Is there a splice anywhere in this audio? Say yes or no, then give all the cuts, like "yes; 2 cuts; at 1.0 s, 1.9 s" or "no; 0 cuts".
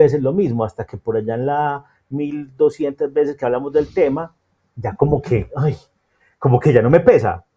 no; 0 cuts